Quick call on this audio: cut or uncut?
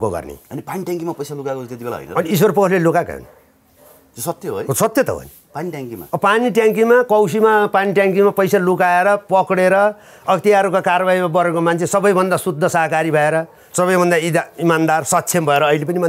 uncut